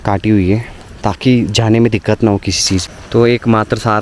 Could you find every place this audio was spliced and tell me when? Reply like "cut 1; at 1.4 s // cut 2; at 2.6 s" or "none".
cut 1; at 2.8 s